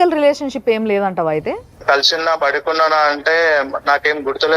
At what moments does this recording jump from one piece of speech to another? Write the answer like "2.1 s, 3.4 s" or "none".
1.8 s